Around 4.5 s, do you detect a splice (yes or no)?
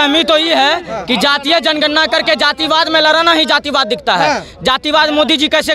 no